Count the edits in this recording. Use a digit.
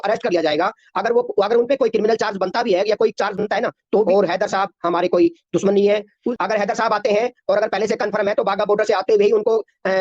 2